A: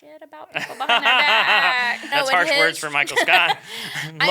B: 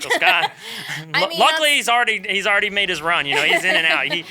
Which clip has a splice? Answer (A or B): A